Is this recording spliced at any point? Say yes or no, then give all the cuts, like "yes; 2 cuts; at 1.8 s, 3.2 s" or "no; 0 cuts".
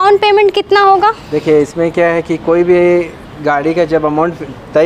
no; 0 cuts